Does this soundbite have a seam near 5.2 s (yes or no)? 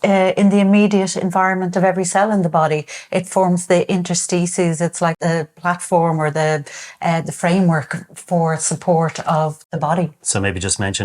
yes